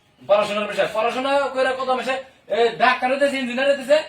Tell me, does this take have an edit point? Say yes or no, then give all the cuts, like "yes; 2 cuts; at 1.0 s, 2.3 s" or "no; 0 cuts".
no; 0 cuts